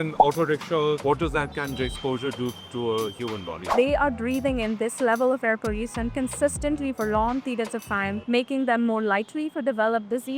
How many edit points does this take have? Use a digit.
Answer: 3